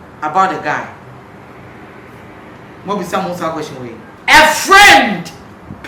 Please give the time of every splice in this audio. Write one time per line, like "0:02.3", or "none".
0:04.0